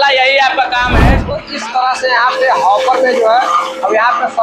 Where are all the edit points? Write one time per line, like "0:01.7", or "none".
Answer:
0:01.4